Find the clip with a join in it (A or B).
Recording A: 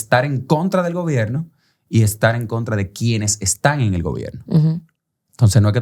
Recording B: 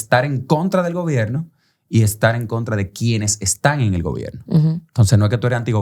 B